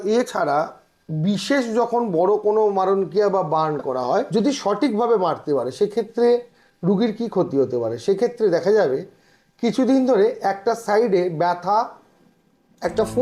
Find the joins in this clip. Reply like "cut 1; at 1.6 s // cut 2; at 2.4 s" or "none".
cut 1; at 4.3 s

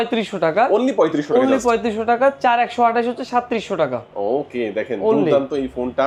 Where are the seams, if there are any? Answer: none

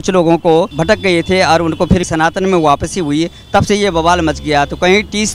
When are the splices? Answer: none

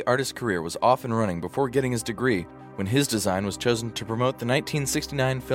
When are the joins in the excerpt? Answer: none

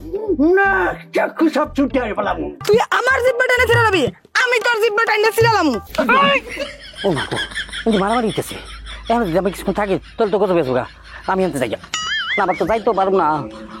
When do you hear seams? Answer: cut 1; at 2.5 s

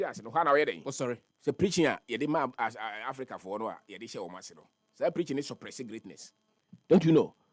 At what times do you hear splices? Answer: cut 1; at 1.3 s

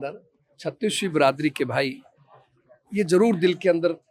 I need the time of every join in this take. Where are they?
none

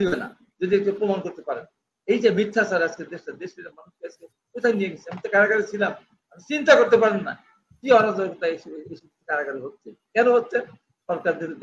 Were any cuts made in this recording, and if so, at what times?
none

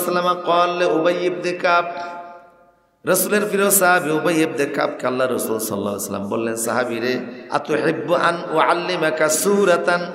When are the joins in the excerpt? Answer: cut 1; at 7.4 s

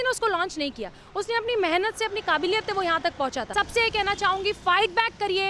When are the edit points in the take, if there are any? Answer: cut 1; at 3.5 s

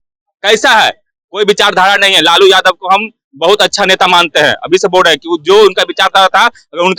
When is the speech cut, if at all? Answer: none

